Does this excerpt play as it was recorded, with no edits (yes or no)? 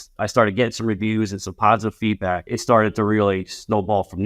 no